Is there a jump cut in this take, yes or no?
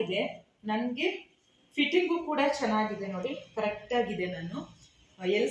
no